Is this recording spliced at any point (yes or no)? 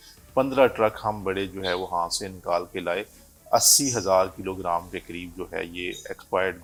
no